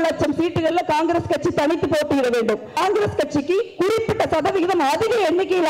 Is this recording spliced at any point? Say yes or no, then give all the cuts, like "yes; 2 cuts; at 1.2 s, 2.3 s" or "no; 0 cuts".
yes; 1 cut; at 2.8 s